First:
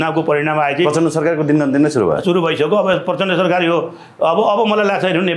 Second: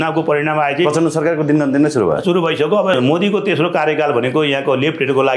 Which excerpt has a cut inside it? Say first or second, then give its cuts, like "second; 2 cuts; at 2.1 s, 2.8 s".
second; 1 cut; at 2.9 s